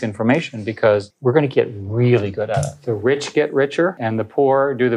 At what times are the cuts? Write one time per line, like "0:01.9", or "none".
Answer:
0:01.1
0:02.7
0:04.0